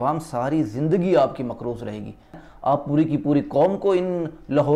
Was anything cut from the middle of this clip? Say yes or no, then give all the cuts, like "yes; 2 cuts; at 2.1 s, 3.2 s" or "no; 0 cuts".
yes; 1 cut; at 2.5 s